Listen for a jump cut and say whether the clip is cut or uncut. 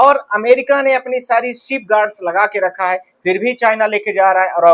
uncut